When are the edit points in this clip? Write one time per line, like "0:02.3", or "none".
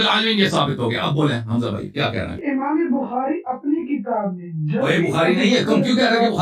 0:02.4